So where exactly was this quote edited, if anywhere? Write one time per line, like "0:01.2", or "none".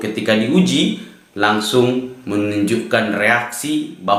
none